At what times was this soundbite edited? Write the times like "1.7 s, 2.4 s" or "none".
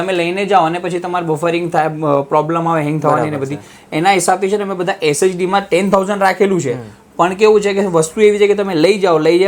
none